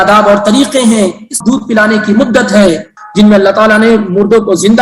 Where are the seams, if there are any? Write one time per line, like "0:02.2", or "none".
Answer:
0:01.3
0:03.0